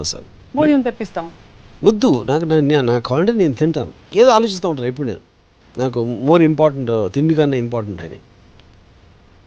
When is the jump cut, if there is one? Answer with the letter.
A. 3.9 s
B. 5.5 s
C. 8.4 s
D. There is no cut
A